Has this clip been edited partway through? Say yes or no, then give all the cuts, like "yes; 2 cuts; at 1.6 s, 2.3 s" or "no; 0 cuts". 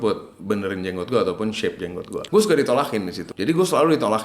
yes; 2 cuts; at 2.2 s, 3.2 s